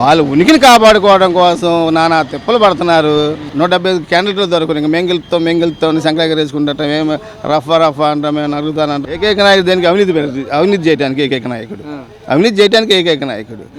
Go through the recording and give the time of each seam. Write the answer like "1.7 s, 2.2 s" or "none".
3.4 s, 9.0 s